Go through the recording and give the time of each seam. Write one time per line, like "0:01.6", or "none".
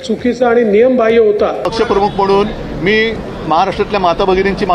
0:01.7